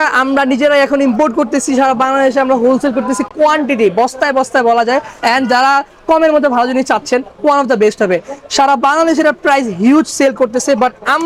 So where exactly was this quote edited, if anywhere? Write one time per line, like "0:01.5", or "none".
none